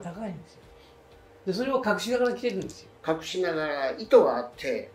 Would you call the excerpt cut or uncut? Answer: uncut